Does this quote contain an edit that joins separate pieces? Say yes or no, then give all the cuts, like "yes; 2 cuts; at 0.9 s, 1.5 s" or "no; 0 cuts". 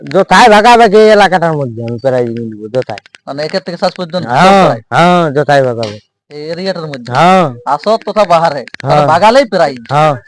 no; 0 cuts